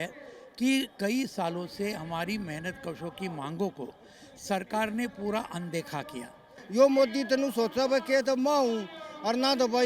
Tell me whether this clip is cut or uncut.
cut